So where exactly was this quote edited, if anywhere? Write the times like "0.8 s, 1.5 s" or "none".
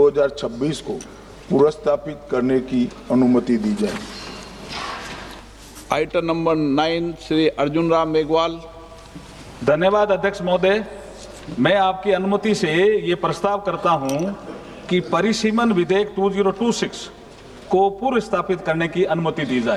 none